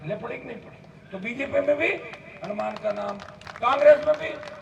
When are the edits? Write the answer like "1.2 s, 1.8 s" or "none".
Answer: none

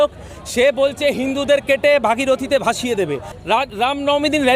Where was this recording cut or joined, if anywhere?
3.3 s

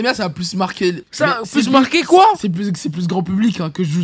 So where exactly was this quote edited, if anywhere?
1.1 s

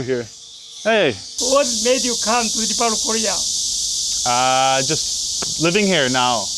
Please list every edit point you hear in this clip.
1.4 s

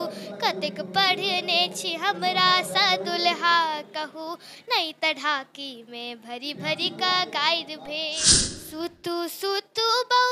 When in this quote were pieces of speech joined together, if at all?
8.2 s

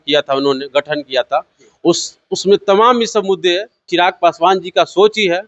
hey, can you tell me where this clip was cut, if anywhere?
3.9 s

